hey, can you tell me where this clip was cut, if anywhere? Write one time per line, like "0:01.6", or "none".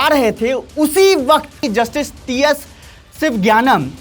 0:01.6

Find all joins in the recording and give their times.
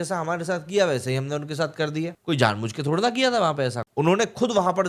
0:02.2
0:03.8

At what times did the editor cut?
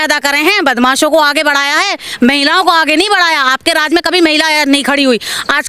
none

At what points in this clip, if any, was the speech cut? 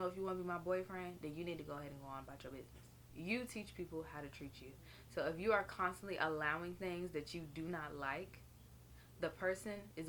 0:03.1

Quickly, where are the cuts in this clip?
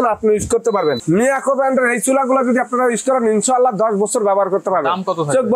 0:01.0

